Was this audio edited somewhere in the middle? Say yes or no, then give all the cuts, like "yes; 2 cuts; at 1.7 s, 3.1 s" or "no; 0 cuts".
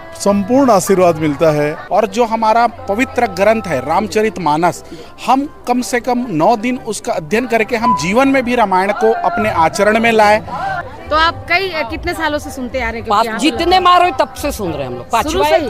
yes; 2 cuts; at 1.8 s, 10.8 s